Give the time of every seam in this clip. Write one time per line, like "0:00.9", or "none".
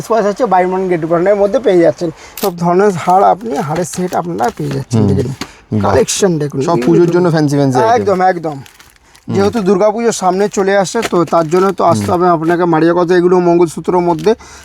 0:02.4

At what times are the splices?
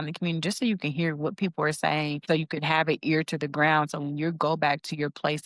0:02.2

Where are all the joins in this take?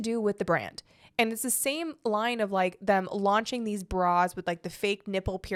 none

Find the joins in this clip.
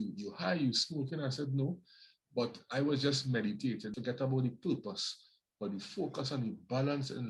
0:03.9

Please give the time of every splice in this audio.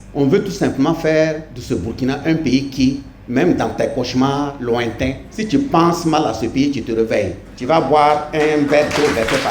0:01.5
0:04.6

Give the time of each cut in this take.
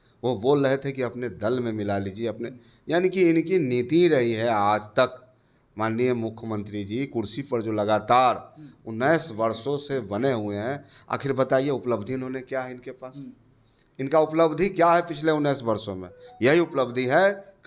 none

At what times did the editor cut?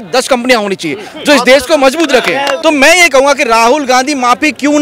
0:02.5

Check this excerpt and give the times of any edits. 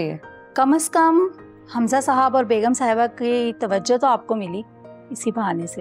none

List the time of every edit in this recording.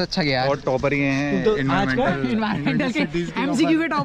none

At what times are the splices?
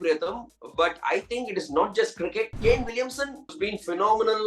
0:02.5
0:03.5

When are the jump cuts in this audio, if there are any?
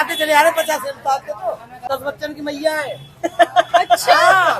0:01.8

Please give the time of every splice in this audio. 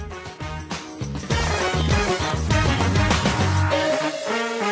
none

